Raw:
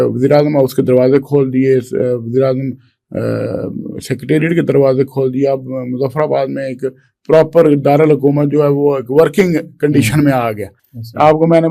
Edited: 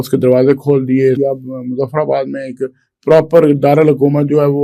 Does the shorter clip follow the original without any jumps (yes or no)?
no